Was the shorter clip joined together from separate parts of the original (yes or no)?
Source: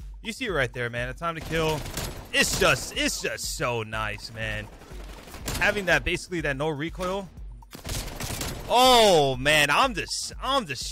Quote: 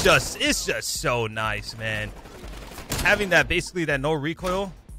no